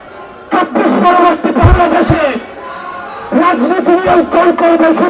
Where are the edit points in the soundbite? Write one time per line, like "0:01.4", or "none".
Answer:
none